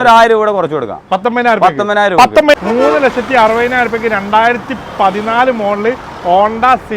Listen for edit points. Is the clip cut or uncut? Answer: cut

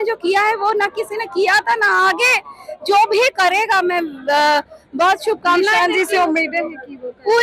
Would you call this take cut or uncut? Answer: uncut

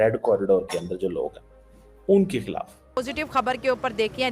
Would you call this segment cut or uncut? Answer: cut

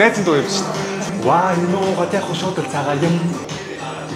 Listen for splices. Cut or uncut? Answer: cut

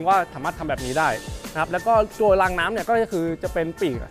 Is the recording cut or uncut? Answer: uncut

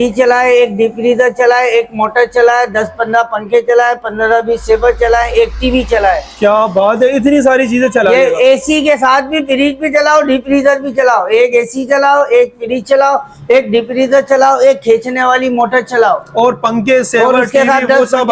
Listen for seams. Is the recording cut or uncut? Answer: uncut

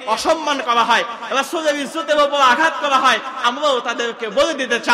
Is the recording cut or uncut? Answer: cut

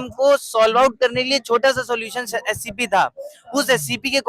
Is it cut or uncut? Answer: uncut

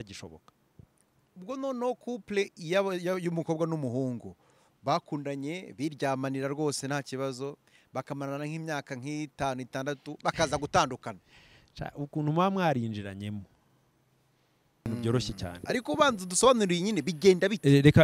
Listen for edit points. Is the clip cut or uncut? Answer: cut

